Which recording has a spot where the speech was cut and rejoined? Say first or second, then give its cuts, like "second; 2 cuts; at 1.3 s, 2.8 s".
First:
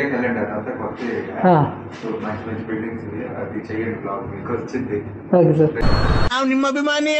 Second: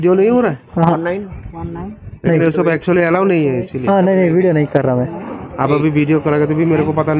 first; 1 cut; at 6.0 s